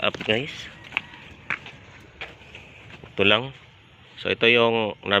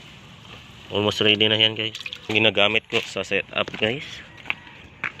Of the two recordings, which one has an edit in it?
second; 1 cut; at 2.3 s

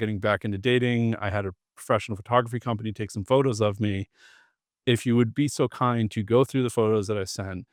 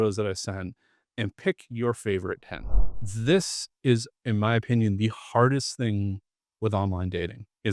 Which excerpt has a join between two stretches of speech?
second; 1 cut; at 2.9 s

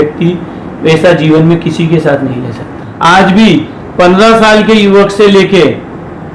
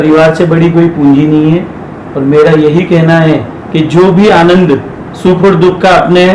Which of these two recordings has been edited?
first; 1 cut; at 2.8 s

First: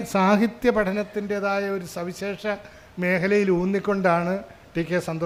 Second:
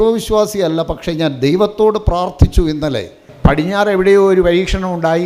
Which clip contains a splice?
second; 1 cut; at 3.3 s

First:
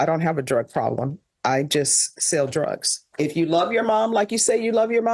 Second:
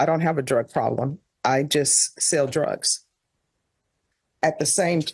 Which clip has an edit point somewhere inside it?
first; 1 cut; at 3.1 s

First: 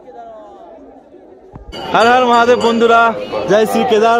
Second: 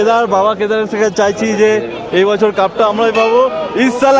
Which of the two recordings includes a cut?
first; 1 cut; at 1.7 s

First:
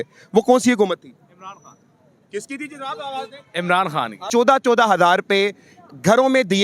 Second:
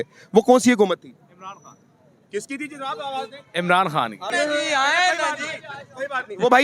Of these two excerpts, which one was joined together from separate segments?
first; 1 cut; at 4.3 s

